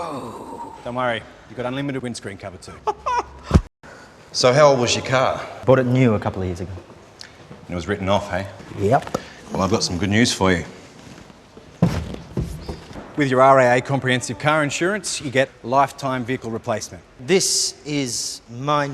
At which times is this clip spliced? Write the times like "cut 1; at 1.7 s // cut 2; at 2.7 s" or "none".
cut 1; at 3.6 s